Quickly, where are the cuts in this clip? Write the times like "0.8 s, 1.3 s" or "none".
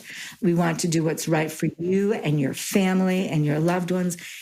none